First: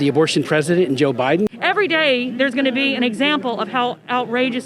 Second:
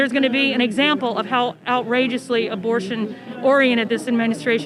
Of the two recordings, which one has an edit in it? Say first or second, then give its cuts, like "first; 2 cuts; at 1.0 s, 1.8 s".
first; 1 cut; at 1.5 s